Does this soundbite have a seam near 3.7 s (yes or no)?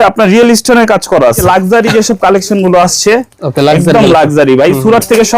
no